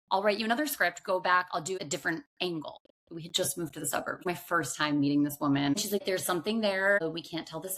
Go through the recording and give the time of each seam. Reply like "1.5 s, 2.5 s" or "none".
1.8 s, 2.8 s, 4.2 s, 5.9 s